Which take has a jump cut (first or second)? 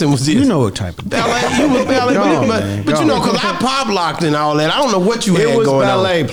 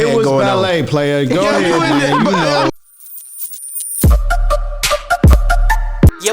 second